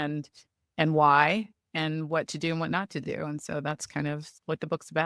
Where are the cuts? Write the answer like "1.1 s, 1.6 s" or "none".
none